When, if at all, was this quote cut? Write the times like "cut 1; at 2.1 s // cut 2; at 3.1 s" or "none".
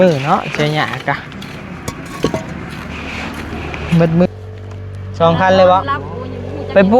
cut 1; at 4.3 s